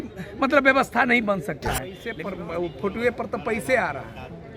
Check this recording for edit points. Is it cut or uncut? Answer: cut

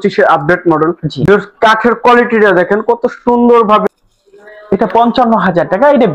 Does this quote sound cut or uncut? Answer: cut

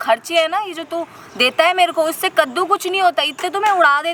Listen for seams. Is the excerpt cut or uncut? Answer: uncut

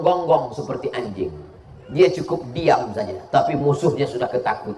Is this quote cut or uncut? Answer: uncut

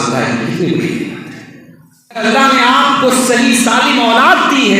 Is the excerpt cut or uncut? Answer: cut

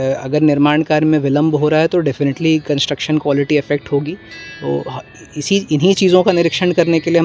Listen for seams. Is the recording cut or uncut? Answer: uncut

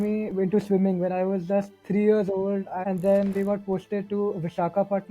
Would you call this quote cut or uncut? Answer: cut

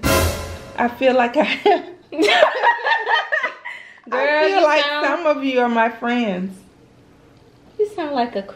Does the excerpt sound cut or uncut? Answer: uncut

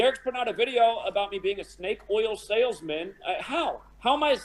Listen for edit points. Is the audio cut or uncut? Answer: uncut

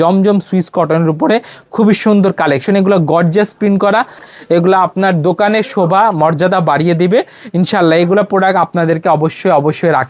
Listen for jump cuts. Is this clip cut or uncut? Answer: cut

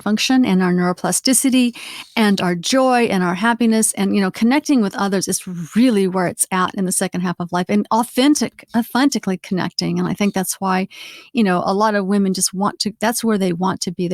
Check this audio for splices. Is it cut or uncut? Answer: uncut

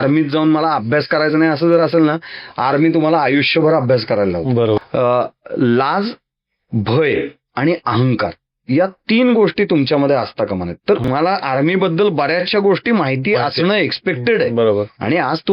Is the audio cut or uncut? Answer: cut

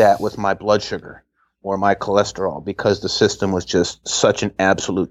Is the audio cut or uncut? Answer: uncut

